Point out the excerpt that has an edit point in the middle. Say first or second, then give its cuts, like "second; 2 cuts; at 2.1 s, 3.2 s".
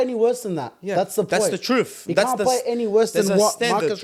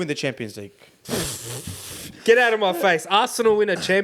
second; 1 cut; at 2.1 s